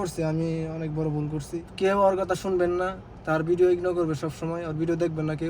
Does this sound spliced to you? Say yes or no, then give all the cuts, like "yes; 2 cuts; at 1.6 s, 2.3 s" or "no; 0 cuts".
yes; 1 cut; at 1.7 s